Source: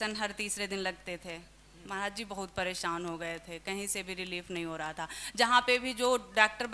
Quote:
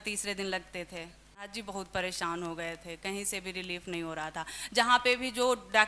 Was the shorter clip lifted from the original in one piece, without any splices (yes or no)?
no